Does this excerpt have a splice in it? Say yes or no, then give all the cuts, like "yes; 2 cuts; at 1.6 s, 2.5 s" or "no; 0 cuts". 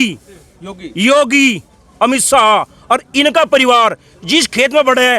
no; 0 cuts